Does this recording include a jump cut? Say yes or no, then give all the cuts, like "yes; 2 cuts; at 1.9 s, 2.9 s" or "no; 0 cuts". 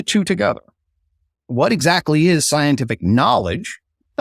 yes; 1 cut; at 1.5 s